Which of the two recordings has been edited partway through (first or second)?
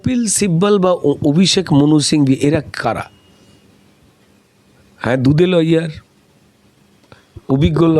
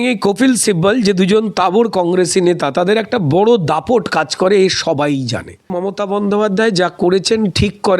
second